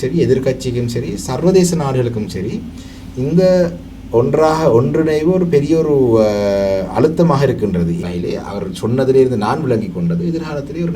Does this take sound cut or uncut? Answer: cut